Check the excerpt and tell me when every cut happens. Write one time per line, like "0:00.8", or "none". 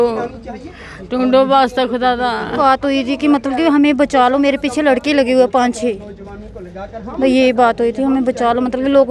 0:02.5